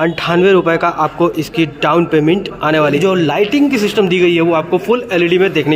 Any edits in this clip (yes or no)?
yes